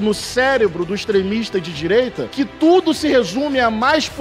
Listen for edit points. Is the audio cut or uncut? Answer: uncut